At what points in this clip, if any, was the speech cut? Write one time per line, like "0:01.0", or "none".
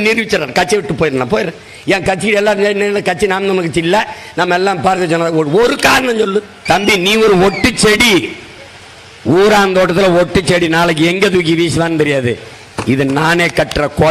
0:06.5